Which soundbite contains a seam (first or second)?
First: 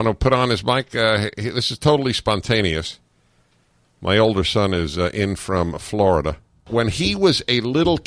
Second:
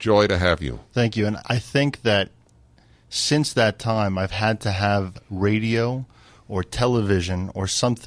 first